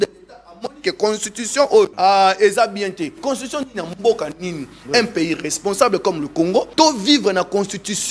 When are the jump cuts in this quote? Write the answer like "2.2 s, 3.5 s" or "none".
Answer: 1.9 s, 3.2 s, 6.7 s